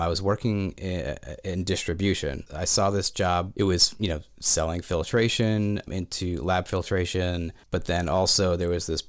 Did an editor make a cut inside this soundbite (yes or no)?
yes